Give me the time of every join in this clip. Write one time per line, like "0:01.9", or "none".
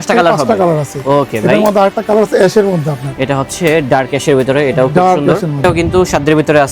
none